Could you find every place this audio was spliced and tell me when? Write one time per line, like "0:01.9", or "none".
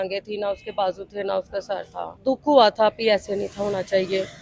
none